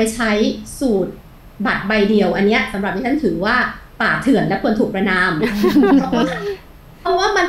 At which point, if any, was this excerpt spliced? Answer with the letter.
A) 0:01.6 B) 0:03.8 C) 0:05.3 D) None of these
D